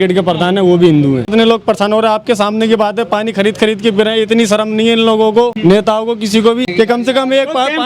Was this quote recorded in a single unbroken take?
no; 3 cuts; at 1.2 s, 5.5 s, 6.7 s

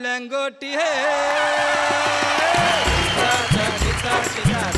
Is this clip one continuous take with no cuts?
no; 1 cut; at 3.0 s

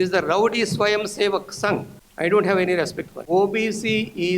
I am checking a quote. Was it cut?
yes; 2 cuts; at 2.0 s, 3.1 s

